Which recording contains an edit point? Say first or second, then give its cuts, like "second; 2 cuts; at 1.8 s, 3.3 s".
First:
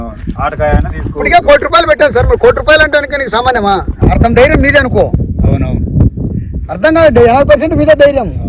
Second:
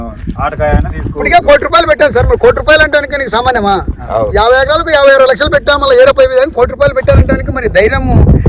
first; 1 cut; at 4.0 s